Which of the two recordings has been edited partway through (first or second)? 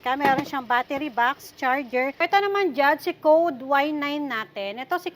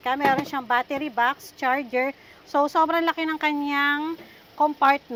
first